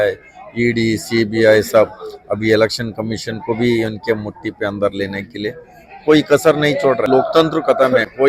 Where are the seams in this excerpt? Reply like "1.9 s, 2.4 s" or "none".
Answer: 7.1 s

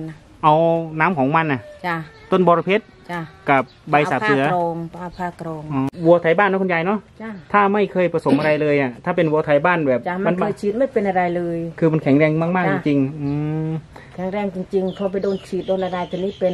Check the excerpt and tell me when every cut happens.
5.9 s

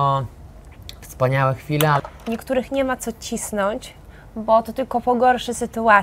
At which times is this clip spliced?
2.0 s

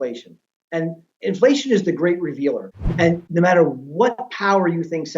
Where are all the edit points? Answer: 2.7 s

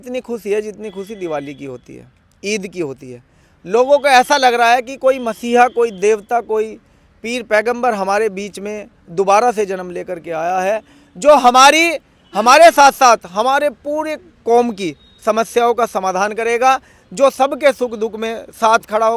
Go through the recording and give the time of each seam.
none

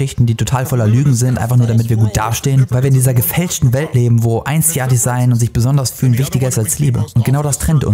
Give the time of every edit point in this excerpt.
none

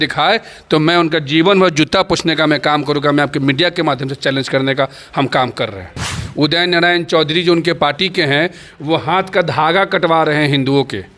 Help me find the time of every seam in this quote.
6.2 s

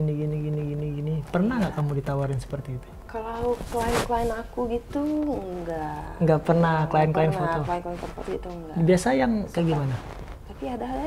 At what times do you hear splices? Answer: none

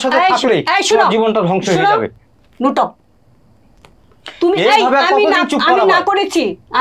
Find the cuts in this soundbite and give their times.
none

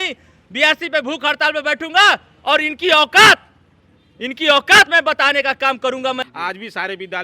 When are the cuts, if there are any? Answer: 6.2 s

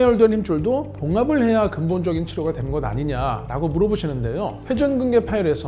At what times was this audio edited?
4.6 s

